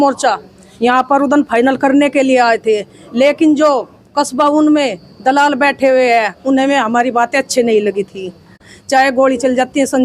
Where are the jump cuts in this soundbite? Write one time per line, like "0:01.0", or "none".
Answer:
0:08.7